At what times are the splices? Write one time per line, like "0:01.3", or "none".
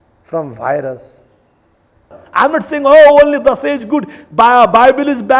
0:02.2